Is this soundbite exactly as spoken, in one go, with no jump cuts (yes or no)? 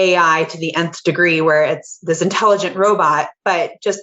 yes